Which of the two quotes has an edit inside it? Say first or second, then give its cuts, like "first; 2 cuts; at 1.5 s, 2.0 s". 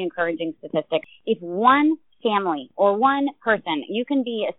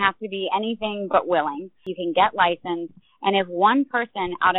first; 1 cut; at 1.1 s